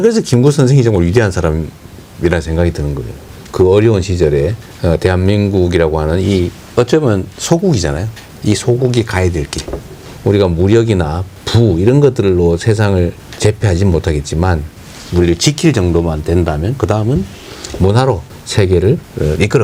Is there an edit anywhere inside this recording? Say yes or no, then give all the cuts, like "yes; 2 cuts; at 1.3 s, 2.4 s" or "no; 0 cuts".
no; 0 cuts